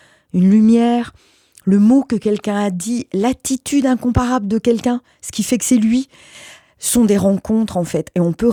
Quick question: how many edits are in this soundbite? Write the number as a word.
zero